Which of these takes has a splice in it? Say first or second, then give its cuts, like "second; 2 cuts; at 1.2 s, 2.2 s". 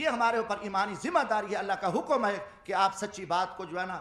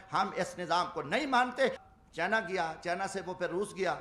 second; 1 cut; at 1.9 s